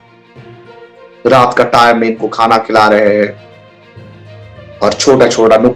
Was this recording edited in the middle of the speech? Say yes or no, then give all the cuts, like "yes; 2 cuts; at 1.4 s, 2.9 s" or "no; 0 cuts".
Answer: no; 0 cuts